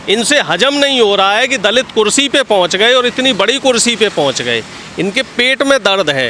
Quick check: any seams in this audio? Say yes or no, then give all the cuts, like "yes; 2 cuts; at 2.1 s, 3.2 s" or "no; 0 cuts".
no; 0 cuts